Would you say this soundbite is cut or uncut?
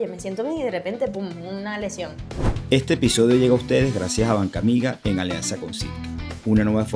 cut